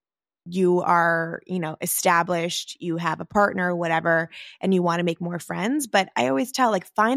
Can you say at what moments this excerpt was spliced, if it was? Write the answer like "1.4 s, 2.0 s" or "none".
none